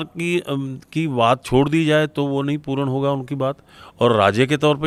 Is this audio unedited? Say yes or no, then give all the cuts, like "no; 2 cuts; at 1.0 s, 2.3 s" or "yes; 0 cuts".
yes; 0 cuts